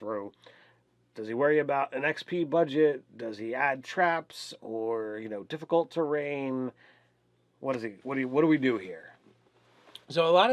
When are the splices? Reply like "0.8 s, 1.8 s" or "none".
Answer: 9.3 s

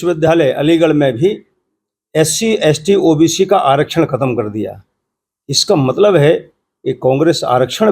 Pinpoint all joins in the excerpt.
none

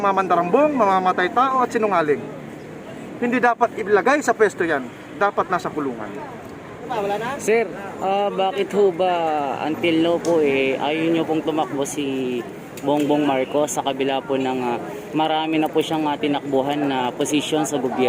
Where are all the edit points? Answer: 6.9 s

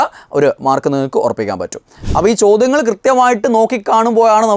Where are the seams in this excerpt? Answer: 2.0 s

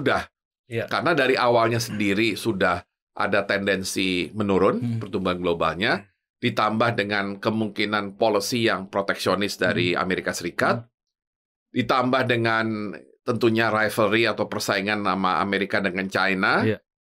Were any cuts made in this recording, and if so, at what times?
none

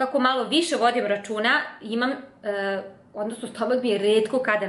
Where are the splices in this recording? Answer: none

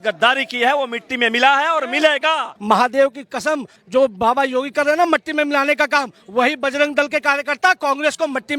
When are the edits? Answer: 2.5 s, 3.7 s

